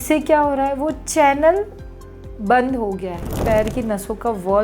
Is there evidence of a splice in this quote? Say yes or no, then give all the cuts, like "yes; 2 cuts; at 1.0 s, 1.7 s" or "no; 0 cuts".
yes; 1 cut; at 3.3 s